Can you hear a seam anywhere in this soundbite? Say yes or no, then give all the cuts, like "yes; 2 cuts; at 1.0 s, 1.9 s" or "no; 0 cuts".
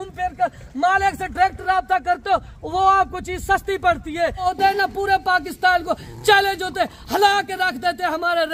yes; 1 cut; at 4.8 s